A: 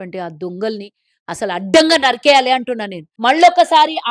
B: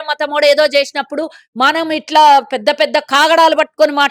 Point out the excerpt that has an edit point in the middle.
A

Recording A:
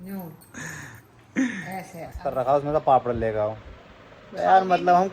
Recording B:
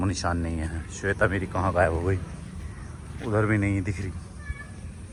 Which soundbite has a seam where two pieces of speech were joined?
A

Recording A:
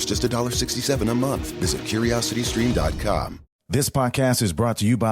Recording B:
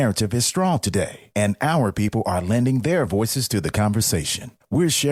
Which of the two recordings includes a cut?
A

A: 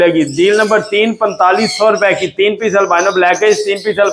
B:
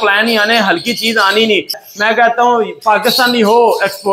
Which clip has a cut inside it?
B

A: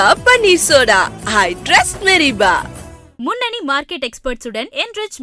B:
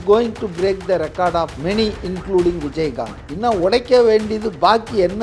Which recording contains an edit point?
B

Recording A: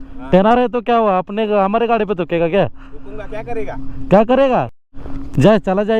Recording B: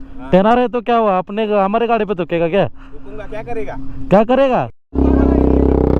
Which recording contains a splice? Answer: B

